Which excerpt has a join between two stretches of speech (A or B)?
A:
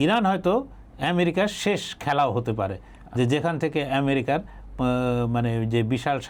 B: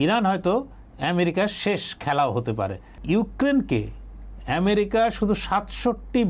B